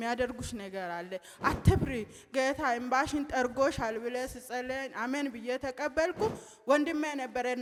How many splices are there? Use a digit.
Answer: 0